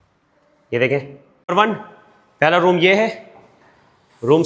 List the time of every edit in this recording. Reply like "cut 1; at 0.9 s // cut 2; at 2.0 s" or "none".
cut 1; at 1.5 s